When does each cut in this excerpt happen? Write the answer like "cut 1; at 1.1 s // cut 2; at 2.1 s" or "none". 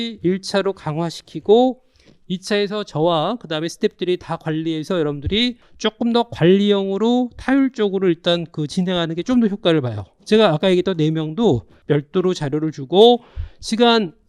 cut 1; at 5.7 s // cut 2; at 11.7 s